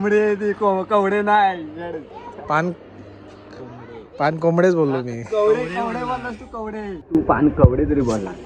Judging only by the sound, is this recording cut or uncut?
cut